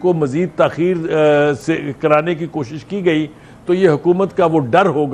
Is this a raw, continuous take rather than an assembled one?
yes; 0 cuts

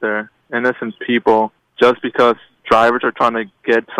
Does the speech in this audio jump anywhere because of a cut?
yes; 1 cut; at 1.6 s

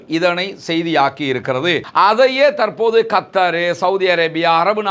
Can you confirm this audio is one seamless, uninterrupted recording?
no; 1 cut; at 1.8 s

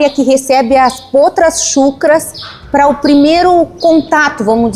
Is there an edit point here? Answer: no; 0 cuts

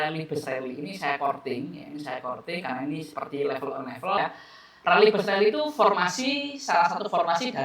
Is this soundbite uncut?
no; 1 cut; at 4.2 s

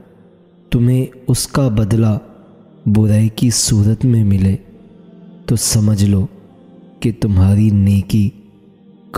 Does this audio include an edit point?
no; 0 cuts

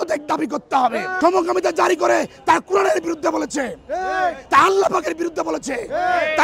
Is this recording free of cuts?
yes; 0 cuts

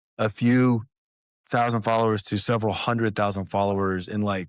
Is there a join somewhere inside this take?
no; 0 cuts

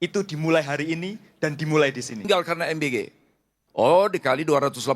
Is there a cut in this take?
yes; 1 cut; at 2.2 s

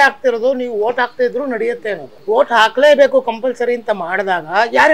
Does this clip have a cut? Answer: yes; 1 cut; at 2.1 s

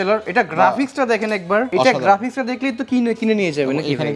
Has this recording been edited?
yes; 1 cut; at 1.7 s

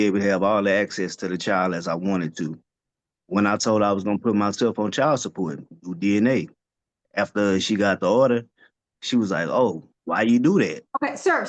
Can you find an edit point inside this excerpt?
yes; 1 cut; at 9.9 s

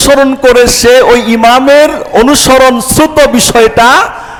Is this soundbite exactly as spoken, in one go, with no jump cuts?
yes; 0 cuts

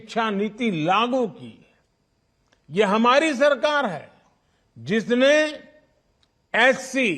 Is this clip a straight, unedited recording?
yes; 0 cuts

